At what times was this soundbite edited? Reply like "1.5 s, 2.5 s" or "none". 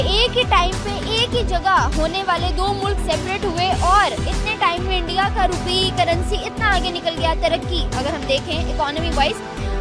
none